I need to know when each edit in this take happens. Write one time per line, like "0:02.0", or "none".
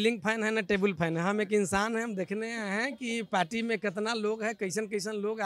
none